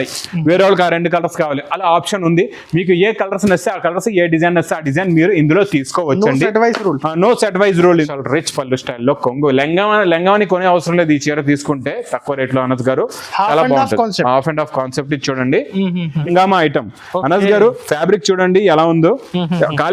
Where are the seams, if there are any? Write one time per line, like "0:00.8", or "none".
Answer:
0:08.1
0:16.2